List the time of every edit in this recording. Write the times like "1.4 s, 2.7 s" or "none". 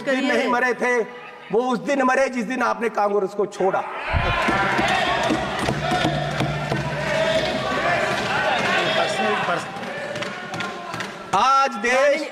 none